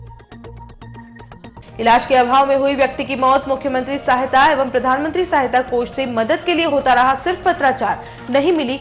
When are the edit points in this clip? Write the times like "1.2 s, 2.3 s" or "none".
1.4 s